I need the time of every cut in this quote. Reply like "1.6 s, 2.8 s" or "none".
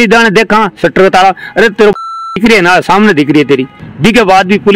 3.9 s